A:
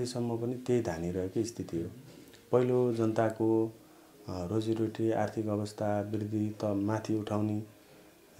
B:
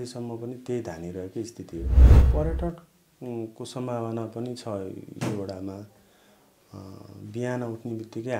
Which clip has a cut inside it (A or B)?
B